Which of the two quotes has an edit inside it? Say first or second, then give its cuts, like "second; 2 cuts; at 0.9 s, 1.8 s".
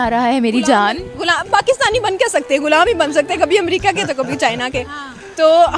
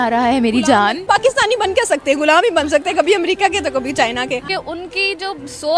second; 2 cuts; at 1.0 s, 4.5 s